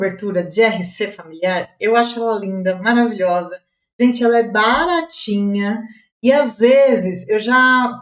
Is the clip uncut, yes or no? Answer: yes